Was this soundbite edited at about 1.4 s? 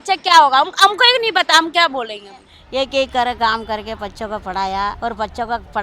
no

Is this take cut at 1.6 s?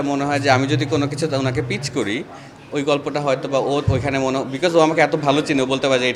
no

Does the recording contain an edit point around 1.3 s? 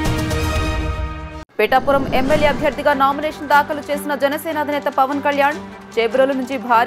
yes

